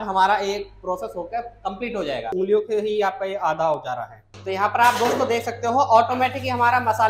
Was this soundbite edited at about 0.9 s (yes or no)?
no